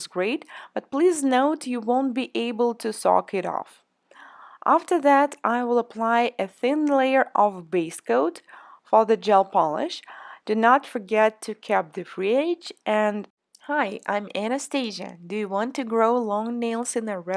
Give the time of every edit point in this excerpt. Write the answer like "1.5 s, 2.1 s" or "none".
none